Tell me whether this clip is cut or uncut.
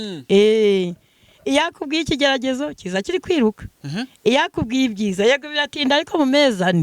uncut